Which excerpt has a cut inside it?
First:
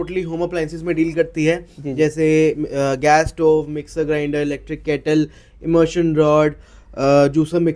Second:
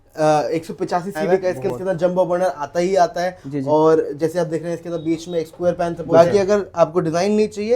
second; 2 cuts; at 1.6 s, 6.1 s

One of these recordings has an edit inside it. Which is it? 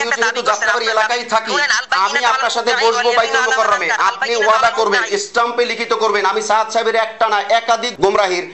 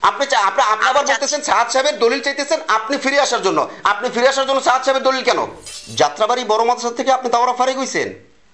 second; 1 cut; at 5.6 s

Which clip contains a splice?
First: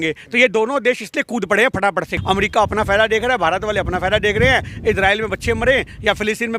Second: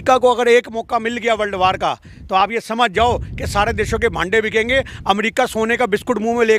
first; 1 cut; at 2.1 s

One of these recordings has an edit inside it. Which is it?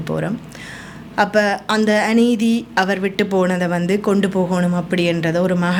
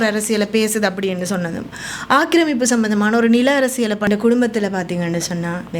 second; 1 cut; at 4.1 s

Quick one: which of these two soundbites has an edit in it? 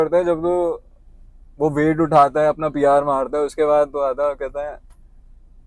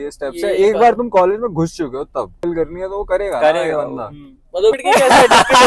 second; 2 cuts; at 2.4 s, 4.7 s

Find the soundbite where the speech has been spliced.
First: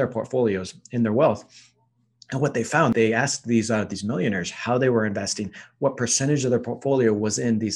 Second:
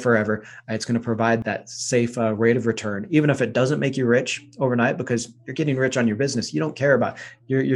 second; 1 cut; at 1.4 s

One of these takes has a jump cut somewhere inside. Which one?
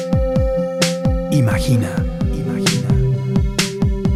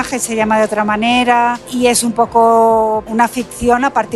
second; 2 cuts; at 1.6 s, 3.1 s

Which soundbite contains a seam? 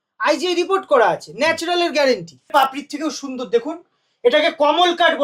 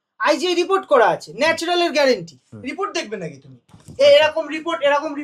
first; 1 cut; at 2.3 s

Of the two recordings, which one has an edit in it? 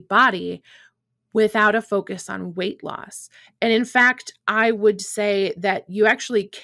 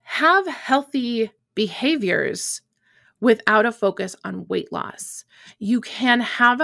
second; 1 cut; at 1.4 s

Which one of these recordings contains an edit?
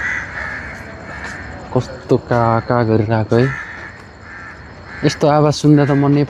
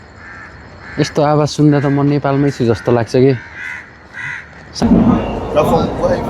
second; 1 cut; at 4.8 s

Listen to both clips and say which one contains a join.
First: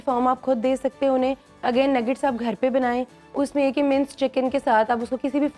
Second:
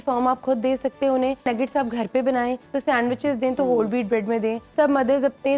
second; 3 cuts; at 1.5 s, 2.7 s, 4.6 s

